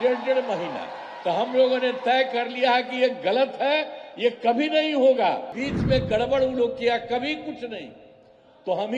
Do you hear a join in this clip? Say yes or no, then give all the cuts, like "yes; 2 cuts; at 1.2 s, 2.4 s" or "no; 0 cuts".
yes; 1 cut; at 5.6 s